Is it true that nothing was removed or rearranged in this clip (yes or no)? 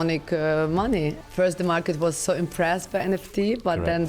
no